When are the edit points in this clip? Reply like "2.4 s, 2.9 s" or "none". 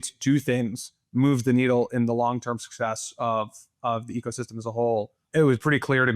5.2 s